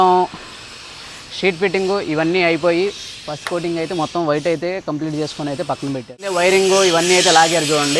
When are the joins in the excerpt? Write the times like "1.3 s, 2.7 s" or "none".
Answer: 6.1 s